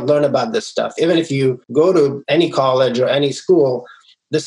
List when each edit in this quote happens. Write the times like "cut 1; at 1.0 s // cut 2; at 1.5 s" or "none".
cut 1; at 1.3 s // cut 2; at 2.2 s